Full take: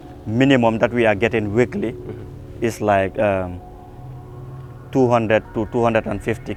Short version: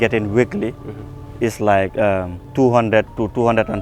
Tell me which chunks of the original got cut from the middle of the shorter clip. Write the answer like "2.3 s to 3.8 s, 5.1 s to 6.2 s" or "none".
3.6 s to 4.8 s

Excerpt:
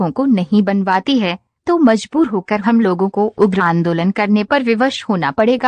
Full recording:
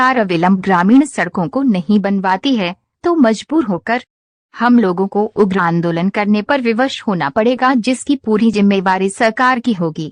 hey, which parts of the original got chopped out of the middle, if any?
4.2 s to 4.8 s

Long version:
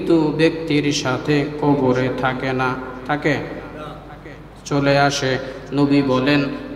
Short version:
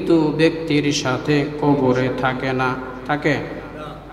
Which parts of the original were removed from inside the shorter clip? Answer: none

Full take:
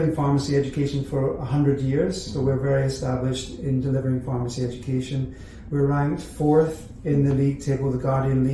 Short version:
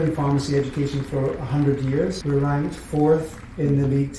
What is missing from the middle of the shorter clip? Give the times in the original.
2.2 s to 5.7 s

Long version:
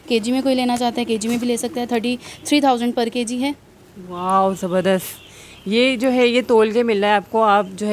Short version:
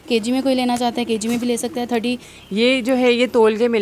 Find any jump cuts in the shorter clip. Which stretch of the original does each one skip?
2.3 s to 5.5 s

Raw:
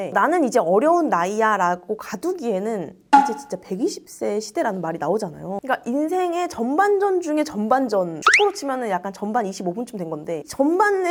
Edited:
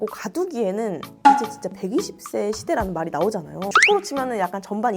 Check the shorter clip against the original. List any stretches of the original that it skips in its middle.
5.6 s to 8.2 s

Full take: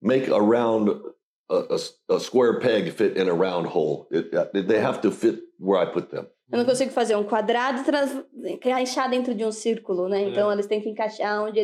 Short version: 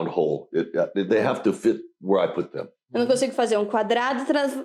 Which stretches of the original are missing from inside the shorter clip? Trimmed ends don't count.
none

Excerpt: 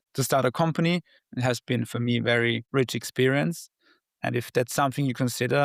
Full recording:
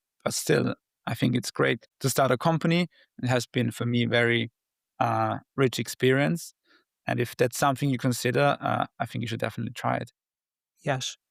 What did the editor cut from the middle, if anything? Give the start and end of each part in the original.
4.5 s to 5.5 s

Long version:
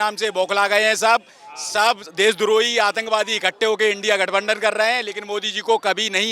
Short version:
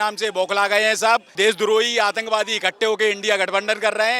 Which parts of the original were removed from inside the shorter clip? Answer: 1.3 s to 2.1 s

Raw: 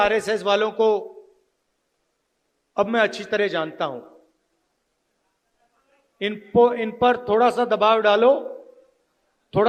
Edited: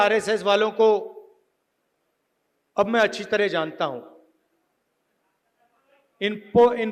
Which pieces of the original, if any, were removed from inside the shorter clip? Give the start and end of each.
none

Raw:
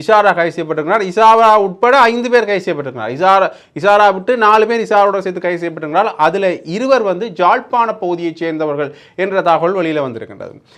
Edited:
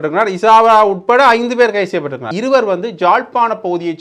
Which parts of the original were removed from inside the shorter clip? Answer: 3.0 s to 6.7 s

